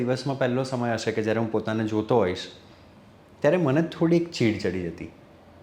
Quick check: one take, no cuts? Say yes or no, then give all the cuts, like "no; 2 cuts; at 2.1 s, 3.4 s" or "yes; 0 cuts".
yes; 0 cuts